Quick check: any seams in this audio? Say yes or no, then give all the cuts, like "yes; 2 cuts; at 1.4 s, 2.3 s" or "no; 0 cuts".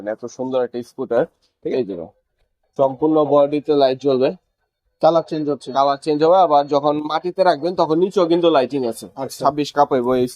yes; 2 cuts; at 1.7 s, 9.4 s